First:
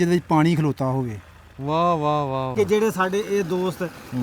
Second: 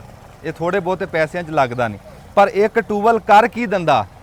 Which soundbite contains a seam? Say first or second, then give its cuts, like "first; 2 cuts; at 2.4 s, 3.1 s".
first; 1 cut; at 2.4 s